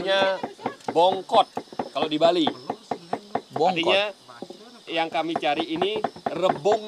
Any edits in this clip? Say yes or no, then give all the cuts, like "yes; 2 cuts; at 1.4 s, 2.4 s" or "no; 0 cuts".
no; 0 cuts